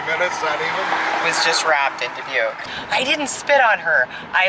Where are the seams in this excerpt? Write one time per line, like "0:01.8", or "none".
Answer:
0:02.7